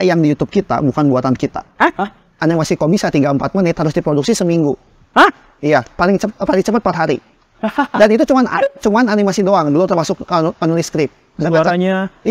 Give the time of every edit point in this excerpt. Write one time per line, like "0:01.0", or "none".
0:02.4

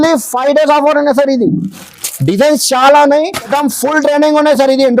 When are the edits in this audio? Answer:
0:03.5

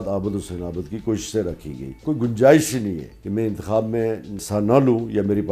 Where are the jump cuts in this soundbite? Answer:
0:02.0
0:03.1
0:04.4

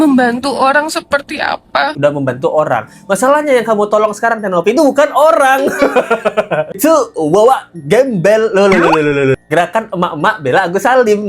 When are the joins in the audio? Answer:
0:01.9

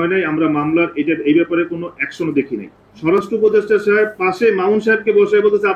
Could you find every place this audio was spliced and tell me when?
0:02.9

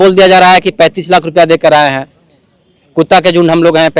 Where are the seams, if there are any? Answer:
none

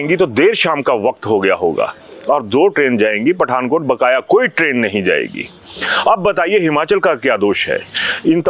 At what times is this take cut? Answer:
none

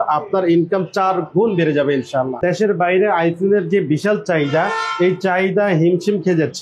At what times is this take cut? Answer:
0:02.4

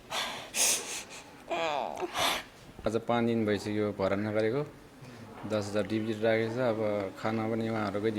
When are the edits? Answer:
0:02.9

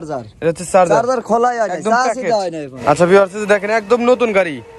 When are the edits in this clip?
0:02.7

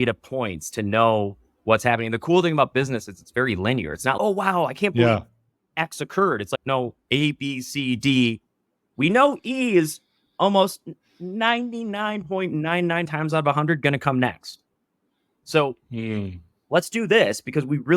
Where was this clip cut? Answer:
0:13.1

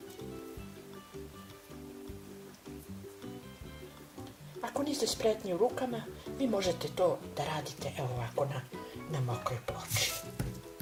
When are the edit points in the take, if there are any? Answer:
none

